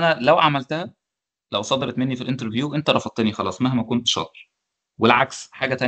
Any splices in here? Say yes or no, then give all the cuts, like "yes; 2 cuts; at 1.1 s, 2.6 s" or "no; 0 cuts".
no; 0 cuts